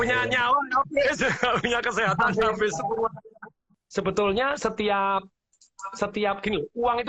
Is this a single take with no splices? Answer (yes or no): no